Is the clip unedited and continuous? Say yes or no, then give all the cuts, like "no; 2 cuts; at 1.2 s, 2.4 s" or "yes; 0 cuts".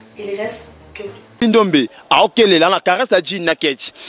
no; 1 cut; at 1.4 s